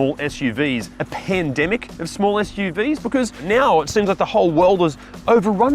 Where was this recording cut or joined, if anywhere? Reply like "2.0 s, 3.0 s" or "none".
1.0 s, 3.4 s

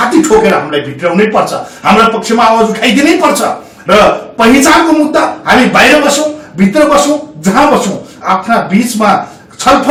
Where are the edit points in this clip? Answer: none

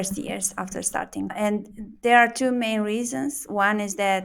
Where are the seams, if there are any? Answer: 1.3 s

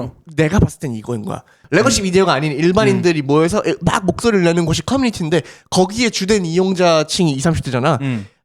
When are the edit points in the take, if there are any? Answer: 1.6 s

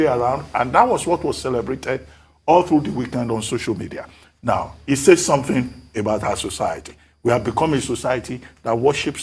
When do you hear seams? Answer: none

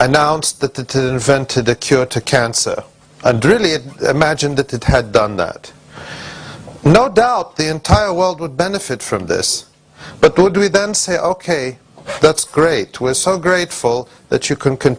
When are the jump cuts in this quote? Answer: 13.4 s

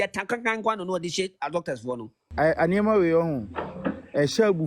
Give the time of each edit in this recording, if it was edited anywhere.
2.2 s

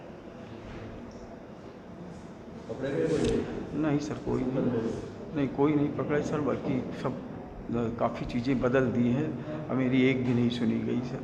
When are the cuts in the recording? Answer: none

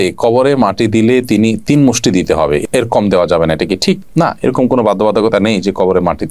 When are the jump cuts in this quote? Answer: none

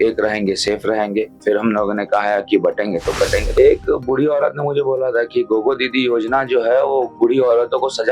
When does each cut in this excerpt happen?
3.5 s

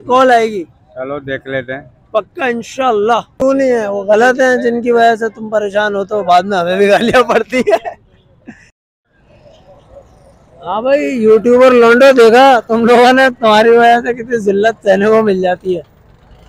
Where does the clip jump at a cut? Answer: 3.3 s

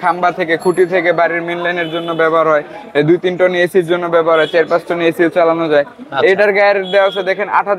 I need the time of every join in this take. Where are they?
none

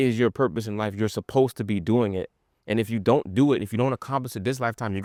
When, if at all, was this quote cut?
none

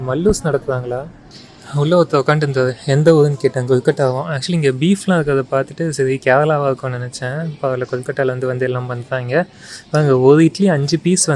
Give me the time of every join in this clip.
none

